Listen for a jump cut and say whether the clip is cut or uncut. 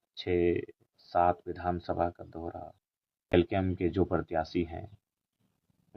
cut